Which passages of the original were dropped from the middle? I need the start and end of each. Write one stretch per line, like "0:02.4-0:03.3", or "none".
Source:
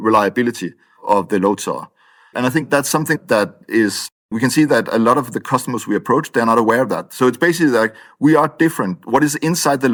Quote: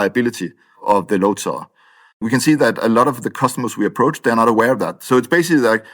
0:02.2-0:04.1